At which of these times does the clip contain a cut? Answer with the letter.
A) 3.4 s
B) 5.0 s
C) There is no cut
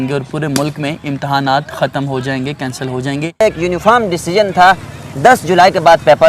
A